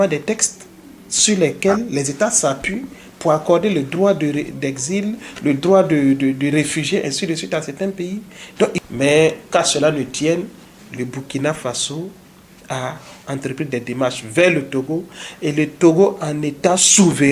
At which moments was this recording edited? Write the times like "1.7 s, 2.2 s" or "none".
8.8 s